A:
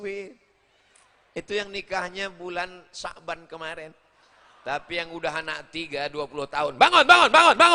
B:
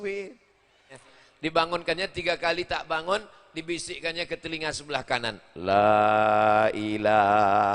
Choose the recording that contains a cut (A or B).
B